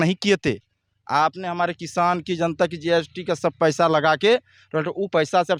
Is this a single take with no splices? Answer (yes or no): yes